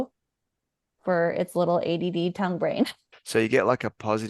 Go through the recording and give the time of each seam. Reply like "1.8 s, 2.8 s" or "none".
3.1 s